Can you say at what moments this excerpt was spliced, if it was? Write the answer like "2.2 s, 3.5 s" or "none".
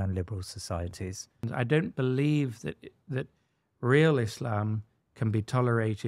1.4 s